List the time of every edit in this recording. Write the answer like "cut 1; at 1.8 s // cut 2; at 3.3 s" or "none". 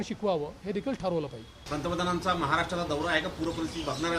cut 1; at 1.6 s